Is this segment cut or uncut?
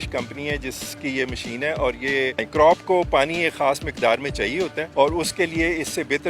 cut